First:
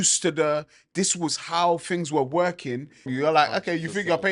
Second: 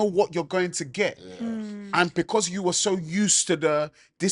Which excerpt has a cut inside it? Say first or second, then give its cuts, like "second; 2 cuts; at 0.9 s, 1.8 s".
first; 1 cut; at 3.1 s